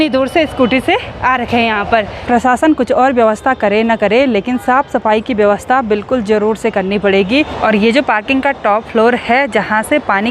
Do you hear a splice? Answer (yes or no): yes